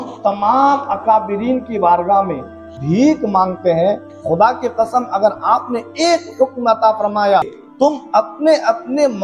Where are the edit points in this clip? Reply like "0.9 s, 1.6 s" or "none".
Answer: 2.7 s, 4.0 s, 7.4 s

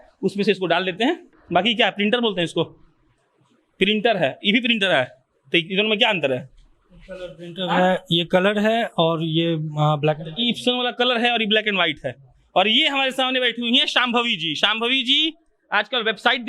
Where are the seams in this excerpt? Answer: none

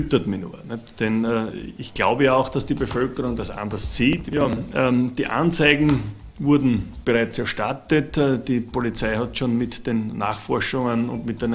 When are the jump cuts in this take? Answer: 4.6 s

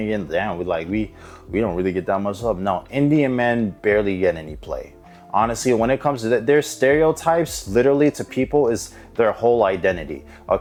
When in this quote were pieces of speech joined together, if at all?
none

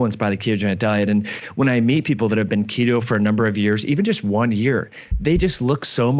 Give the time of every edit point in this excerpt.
none

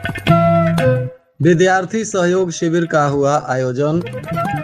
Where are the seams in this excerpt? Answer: 1.1 s

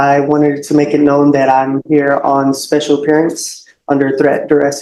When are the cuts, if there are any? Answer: none

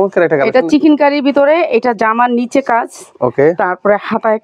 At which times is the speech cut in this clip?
none

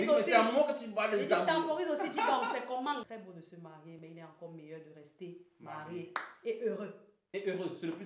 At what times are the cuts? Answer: 3.1 s

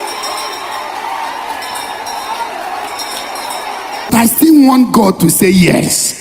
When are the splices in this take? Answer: 4.1 s

